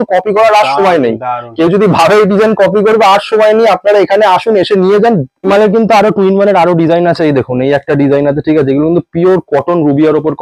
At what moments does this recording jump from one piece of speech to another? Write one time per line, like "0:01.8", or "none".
0:05.3